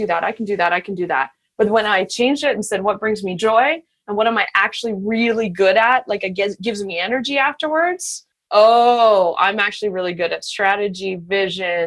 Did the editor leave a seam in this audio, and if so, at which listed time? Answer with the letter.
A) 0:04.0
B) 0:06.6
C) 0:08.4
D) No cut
C